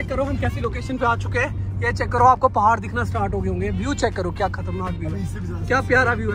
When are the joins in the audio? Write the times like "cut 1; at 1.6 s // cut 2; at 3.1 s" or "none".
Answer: none